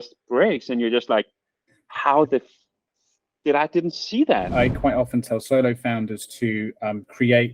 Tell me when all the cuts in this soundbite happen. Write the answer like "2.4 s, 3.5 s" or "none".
4.5 s